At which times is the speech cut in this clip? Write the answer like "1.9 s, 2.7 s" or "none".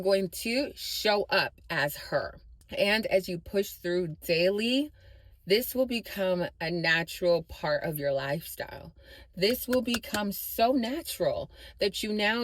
2.4 s